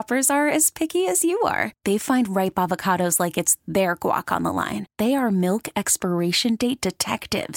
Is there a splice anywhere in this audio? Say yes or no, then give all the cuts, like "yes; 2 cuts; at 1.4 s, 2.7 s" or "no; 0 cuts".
no; 0 cuts